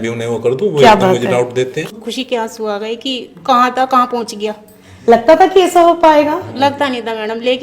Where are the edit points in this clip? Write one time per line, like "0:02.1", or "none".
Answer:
0:01.9